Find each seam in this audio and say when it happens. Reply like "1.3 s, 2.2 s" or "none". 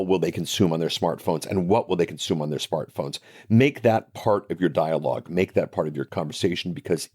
6.1 s